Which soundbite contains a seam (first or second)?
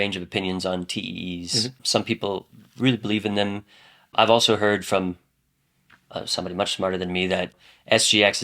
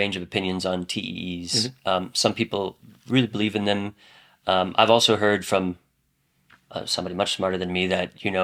first